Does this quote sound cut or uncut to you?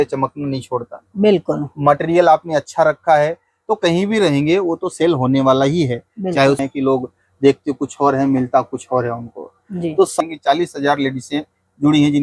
cut